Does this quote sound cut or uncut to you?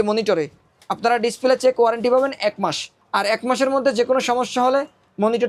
uncut